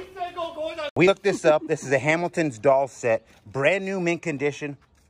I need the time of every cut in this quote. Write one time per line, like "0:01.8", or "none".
0:01.0